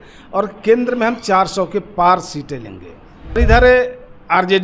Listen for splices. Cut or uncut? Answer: cut